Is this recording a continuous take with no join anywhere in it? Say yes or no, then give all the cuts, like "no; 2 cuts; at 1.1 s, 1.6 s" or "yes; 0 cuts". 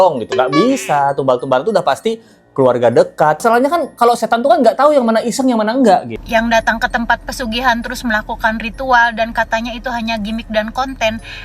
no; 2 cuts; at 3.4 s, 6.2 s